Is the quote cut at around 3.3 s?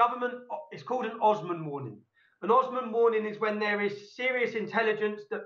no; 0 cuts

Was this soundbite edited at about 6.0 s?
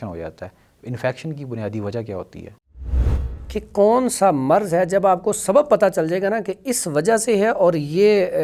no; 1 cut; at 3.1 s

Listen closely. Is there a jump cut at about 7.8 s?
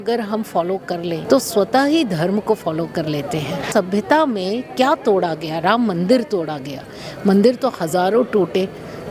no; 2 cuts; at 1.2 s, 3.7 s

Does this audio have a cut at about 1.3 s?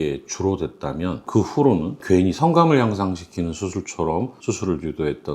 yes; 2 cuts; at 1.3 s, 4.3 s

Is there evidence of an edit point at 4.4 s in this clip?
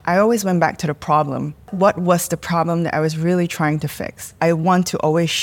yes; 2 cuts; at 1.7 s, 4.4 s

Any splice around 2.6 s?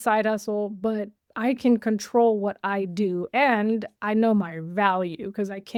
no; 0 cuts

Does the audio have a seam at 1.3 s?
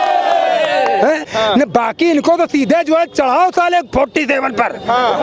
yes; 1 cut; at 1.3 s

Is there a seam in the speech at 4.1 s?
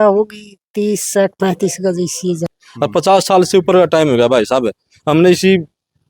no; 1 cut; at 2.6 s

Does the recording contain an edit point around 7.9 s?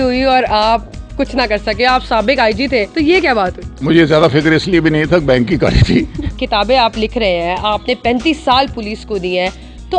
no; 2 cuts; at 3.8 s, 6.2 s

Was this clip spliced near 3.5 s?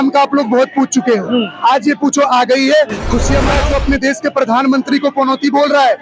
yes; 1 cut; at 3.5 s

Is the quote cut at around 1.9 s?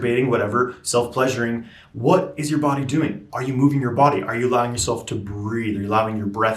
no; 1 cut; at 3.3 s

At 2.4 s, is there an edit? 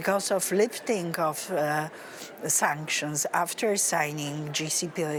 no; 0 cuts

